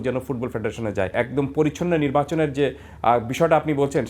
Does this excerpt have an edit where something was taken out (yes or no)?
yes